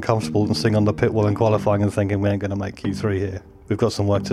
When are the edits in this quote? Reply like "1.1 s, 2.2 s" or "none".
3.4 s